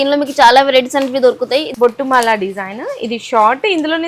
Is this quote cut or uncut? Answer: cut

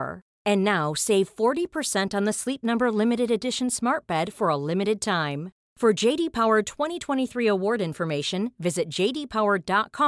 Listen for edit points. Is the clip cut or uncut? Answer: uncut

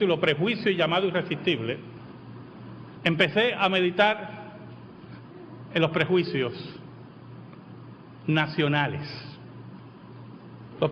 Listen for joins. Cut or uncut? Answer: uncut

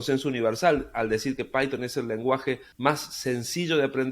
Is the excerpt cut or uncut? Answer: cut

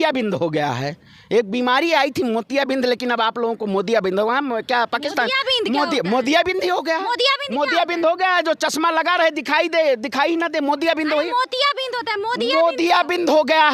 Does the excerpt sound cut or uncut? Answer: uncut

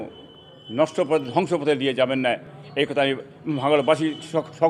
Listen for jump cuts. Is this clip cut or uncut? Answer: uncut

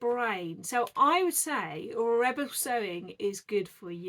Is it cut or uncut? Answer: uncut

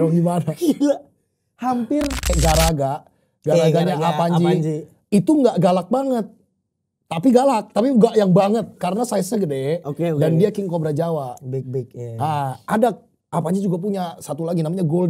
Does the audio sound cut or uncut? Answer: cut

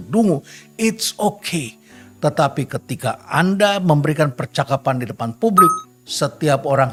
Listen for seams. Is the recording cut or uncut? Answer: uncut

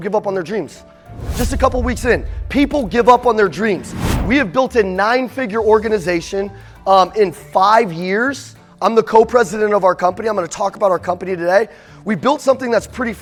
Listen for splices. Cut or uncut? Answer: uncut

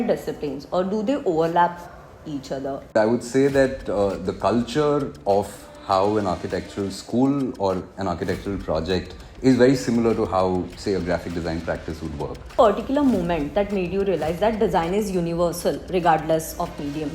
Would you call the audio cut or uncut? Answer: cut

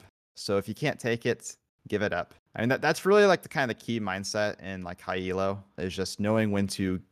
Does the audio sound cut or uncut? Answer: cut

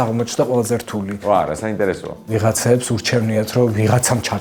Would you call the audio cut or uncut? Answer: cut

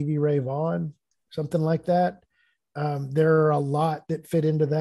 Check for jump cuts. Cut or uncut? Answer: cut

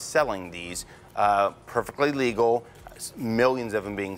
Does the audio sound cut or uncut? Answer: uncut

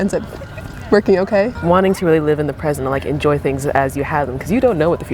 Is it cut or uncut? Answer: cut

